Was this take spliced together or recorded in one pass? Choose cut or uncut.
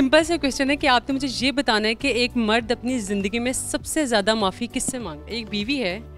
cut